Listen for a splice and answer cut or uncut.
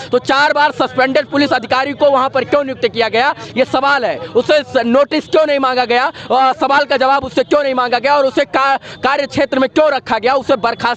uncut